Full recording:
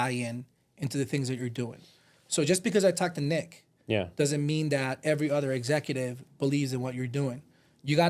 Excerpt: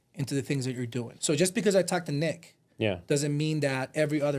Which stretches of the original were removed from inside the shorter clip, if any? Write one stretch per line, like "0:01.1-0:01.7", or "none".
0:01.8-0:02.2